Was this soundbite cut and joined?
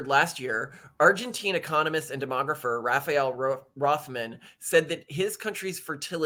no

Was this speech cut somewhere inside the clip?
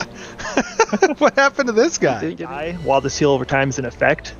yes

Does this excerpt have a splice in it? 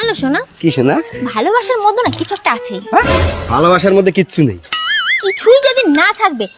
no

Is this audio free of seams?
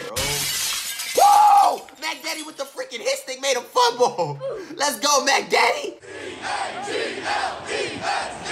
no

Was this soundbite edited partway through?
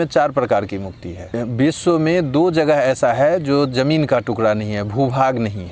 yes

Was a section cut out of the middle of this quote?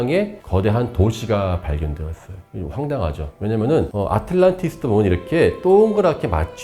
no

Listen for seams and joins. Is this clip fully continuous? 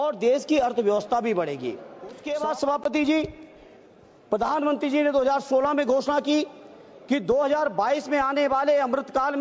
no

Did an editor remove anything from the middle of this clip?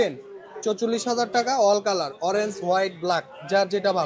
no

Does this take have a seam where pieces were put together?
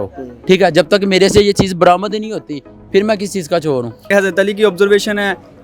yes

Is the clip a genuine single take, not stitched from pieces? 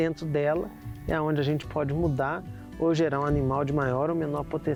yes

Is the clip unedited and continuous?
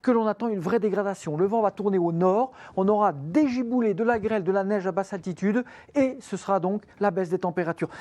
no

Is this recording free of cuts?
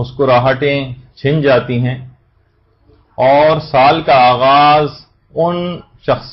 yes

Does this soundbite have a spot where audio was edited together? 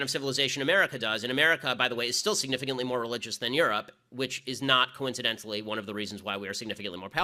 no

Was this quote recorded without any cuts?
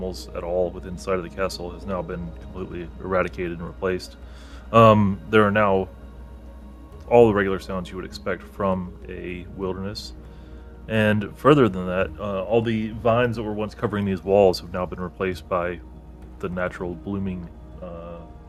yes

